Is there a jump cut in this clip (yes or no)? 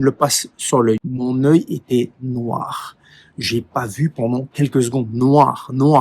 yes